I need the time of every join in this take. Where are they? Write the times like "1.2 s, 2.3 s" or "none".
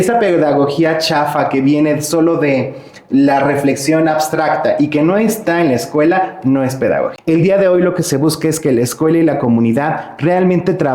7.1 s